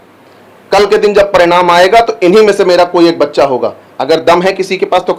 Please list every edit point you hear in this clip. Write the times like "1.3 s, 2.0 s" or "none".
none